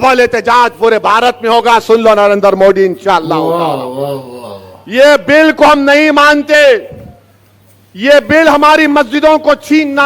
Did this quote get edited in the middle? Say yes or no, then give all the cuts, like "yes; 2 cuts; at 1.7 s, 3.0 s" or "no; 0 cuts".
no; 0 cuts